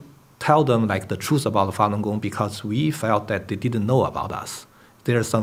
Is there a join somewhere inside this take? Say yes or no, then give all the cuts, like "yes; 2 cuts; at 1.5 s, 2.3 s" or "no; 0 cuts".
no; 0 cuts